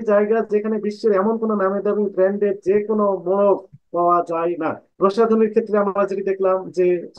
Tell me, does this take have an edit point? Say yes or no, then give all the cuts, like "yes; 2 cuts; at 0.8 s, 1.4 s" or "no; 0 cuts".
yes; 1 cut; at 4.8 s